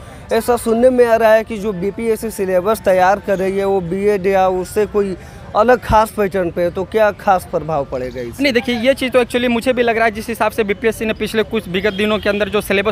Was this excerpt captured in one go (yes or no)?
yes